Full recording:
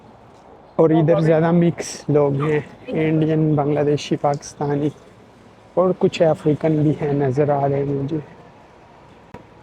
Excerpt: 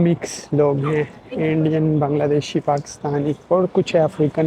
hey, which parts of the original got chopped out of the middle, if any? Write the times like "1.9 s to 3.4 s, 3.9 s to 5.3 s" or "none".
5.0 s to 5.7 s